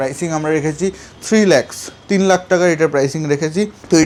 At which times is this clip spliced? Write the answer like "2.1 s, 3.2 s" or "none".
none